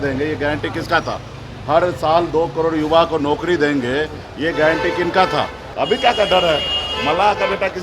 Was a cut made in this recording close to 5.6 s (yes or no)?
yes